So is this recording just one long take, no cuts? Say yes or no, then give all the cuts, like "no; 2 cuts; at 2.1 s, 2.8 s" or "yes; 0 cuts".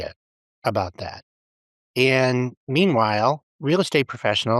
no; 1 cut; at 3.5 s